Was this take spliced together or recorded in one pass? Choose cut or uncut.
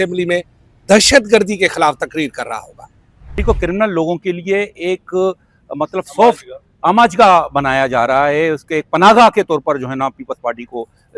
cut